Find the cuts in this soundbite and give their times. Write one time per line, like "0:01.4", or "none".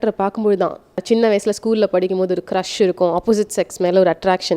0:01.0